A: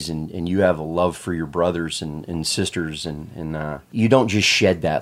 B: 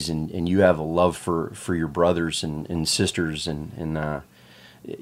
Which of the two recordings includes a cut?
A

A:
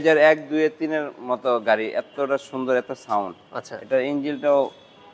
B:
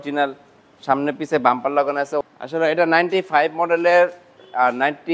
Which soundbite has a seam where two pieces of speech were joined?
B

